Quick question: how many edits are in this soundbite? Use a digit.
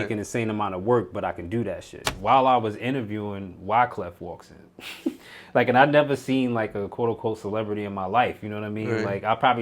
1